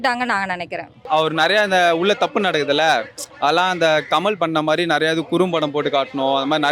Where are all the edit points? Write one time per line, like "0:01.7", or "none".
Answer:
0:01.0